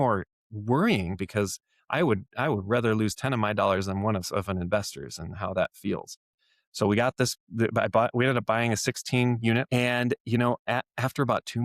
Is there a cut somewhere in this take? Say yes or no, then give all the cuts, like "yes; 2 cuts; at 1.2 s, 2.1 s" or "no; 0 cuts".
yes; 1 cut; at 9.7 s